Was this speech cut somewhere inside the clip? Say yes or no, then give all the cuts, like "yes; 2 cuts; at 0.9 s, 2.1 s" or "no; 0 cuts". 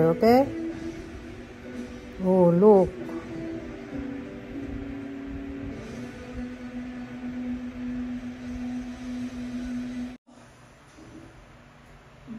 yes; 1 cut; at 10.3 s